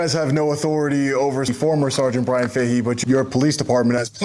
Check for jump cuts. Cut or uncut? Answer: cut